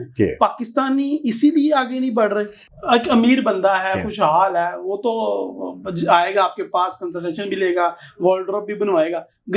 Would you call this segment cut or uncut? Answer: cut